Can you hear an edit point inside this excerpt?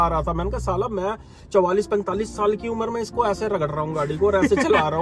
no; 0 cuts

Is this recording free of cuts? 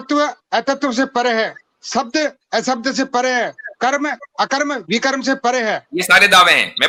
yes; 0 cuts

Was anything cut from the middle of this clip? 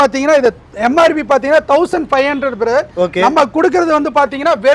no; 0 cuts

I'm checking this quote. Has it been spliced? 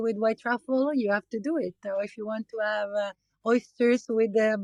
no; 0 cuts

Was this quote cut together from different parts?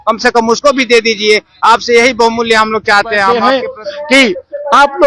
yes; 1 cut; at 3.4 s

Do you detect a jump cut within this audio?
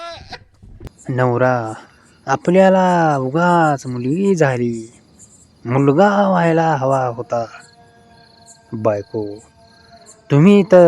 yes; 1 cut; at 1.0 s

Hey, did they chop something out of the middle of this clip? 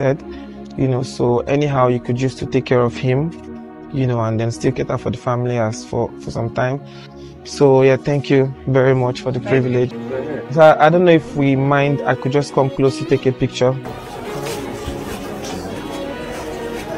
yes; 1 cut; at 9.9 s

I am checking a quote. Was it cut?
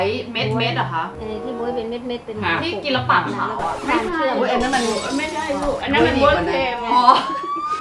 no; 0 cuts

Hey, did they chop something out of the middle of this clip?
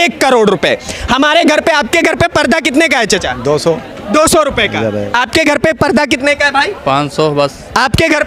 no; 0 cuts

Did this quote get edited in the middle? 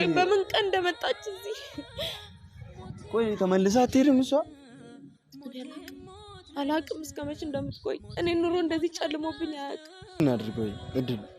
yes; 1 cut; at 10.2 s

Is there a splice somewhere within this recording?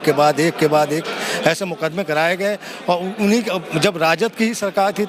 no; 0 cuts

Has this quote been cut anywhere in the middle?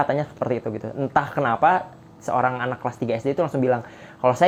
no; 0 cuts

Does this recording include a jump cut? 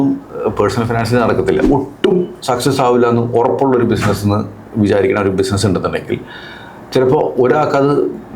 yes; 1 cut; at 1.7 s

